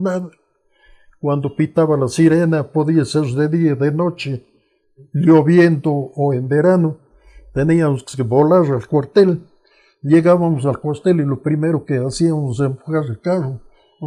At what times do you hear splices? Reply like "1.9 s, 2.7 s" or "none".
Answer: none